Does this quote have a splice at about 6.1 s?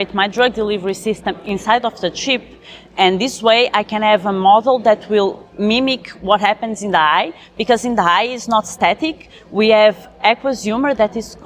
no; 1 cut; at 1.4 s

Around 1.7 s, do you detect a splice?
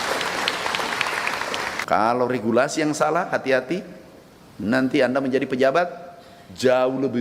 yes; 1 cut; at 1.7 s

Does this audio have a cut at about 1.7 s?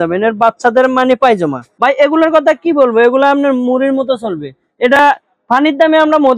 yes; 1 cut; at 1.7 s

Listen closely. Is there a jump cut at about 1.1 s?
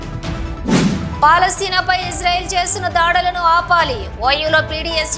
yes; 1 cut; at 1.1 s

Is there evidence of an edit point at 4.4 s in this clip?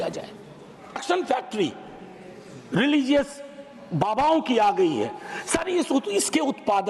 no; 1 cut; at 1.0 s

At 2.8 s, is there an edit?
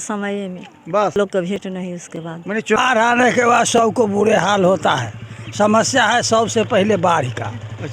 yes; 2 cuts; at 1.2 s, 2.8 s

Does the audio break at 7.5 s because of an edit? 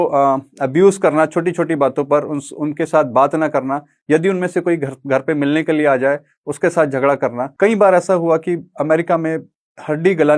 yes; 1 cut; at 7.5 s

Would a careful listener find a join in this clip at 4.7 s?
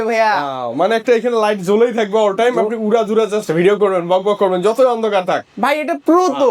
no; 0 cuts

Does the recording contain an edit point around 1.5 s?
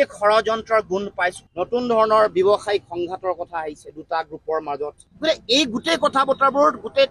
yes; 1 cut; at 1.5 s

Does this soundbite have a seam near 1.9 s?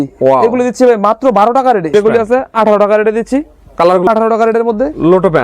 yes; 2 cuts; at 1.9 s, 4.1 s

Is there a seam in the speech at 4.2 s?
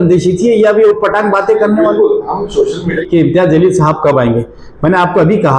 no; 1 cut; at 3.0 s

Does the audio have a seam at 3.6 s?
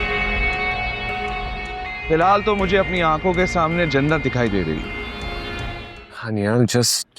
no; 1 cut; at 5.8 s

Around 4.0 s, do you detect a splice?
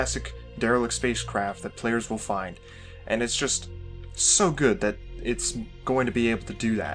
yes; 1 cut; at 4.0 s

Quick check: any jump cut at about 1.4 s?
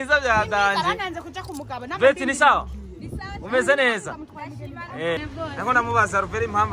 no; 1 cut; at 5.3 s

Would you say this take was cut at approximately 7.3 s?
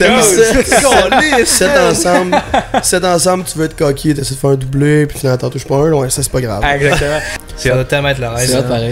yes; 1 cut; at 7.3 s

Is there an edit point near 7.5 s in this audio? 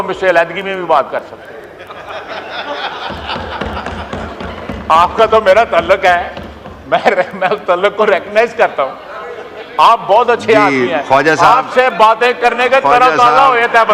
no; 0 cuts

